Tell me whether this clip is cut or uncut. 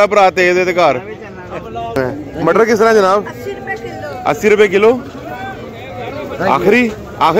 cut